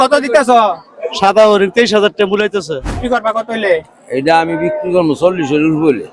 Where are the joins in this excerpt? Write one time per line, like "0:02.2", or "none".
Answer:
0:02.9